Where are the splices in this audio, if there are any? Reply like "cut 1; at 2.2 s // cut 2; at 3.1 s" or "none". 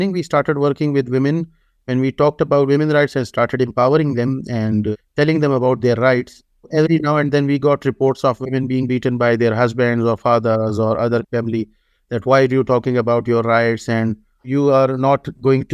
cut 1; at 4.9 s // cut 2; at 6.7 s // cut 3; at 11.3 s // cut 4; at 14.5 s